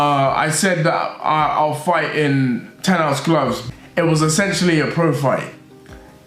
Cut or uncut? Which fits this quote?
uncut